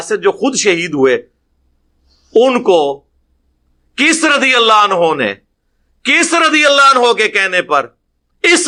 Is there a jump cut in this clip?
no; 0 cuts

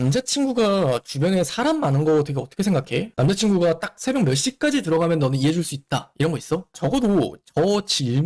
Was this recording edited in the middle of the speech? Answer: yes; 2 cuts; at 3.1 s, 6.7 s

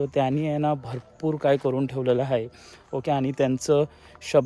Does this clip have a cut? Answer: no; 0 cuts

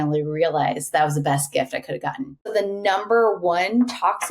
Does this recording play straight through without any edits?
no; 1 cut; at 2.5 s

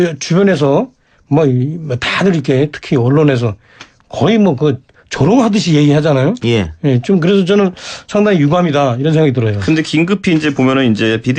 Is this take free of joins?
yes; 0 cuts

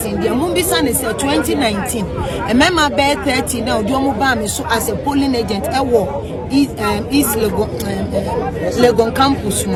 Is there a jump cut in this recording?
no; 0 cuts

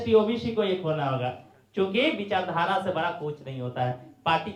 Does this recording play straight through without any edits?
yes; 0 cuts

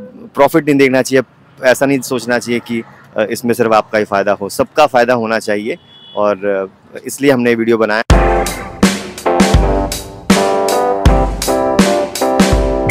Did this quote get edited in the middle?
yes; 1 cut; at 8.1 s

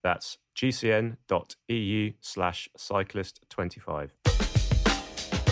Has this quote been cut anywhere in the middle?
yes; 1 cut; at 4.1 s

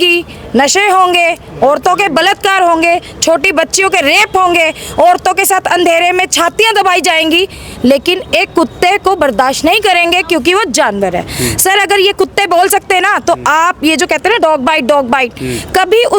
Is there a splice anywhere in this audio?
no; 0 cuts

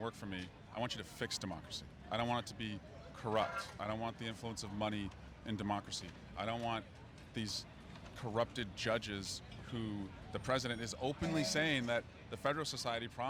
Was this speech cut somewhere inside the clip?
no; 0 cuts

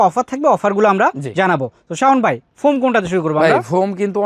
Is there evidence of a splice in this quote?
no; 0 cuts

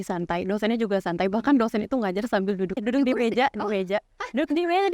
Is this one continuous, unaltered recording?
no; 1 cut; at 2.8 s

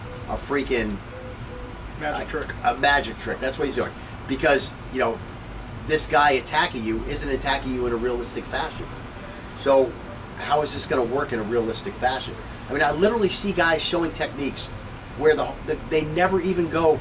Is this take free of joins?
yes; 0 cuts

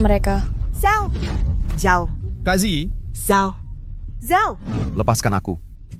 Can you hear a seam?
no; 0 cuts

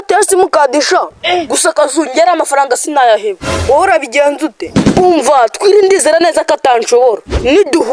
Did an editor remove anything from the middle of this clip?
no; 0 cuts

